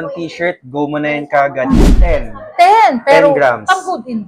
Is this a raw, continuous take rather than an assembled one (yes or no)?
no